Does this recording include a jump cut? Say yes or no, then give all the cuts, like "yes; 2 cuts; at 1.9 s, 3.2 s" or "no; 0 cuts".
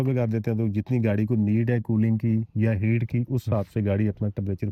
no; 0 cuts